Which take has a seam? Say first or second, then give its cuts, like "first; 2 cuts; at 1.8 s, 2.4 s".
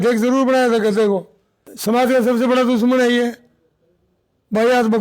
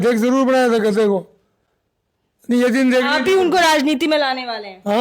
first; 1 cut; at 1.7 s